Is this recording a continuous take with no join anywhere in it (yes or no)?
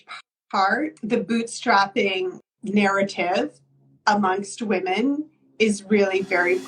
no